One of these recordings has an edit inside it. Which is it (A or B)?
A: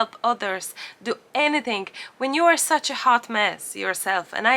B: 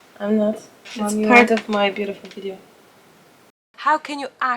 B